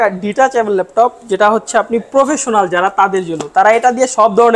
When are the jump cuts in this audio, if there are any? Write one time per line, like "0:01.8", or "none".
none